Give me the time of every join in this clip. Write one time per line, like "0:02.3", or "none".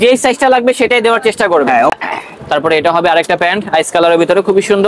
0:01.9